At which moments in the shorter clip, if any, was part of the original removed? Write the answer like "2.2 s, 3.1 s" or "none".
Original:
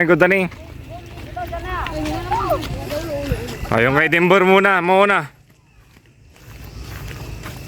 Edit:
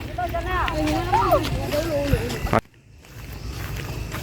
2.6 s